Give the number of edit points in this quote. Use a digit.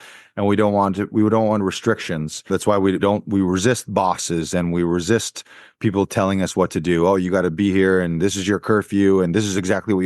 1